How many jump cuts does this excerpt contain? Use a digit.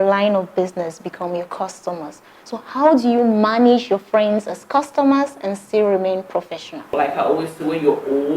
1